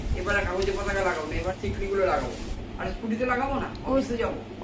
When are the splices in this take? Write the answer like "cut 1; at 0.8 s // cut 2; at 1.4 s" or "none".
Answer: cut 1; at 1.4 s // cut 2; at 2.6 s